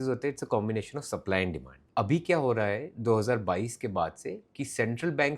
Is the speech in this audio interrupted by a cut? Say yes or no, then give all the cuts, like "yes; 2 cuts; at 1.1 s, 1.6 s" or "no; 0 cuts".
yes; 1 cut; at 1.8 s